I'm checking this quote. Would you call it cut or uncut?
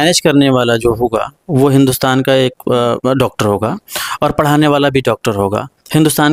uncut